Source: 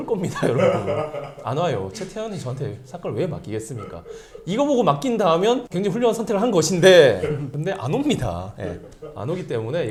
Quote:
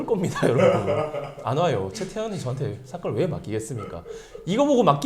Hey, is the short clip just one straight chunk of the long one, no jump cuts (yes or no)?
yes